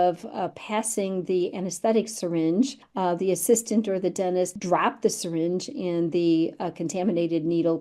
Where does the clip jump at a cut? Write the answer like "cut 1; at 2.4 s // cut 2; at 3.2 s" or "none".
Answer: cut 1; at 2.8 s // cut 2; at 4.5 s